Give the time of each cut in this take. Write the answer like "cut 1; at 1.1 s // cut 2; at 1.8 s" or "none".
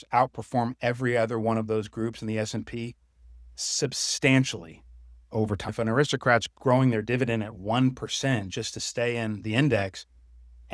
cut 1; at 5.7 s